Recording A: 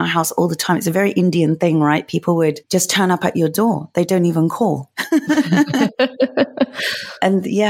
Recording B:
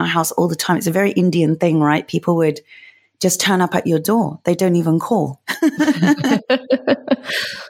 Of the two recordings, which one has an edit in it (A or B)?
A